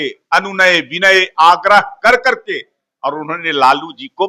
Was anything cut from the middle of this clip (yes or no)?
no